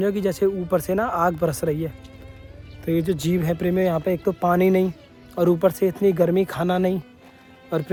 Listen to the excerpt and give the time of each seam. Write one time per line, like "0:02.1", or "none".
none